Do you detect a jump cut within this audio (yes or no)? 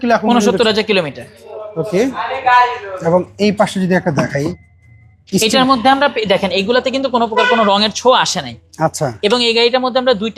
no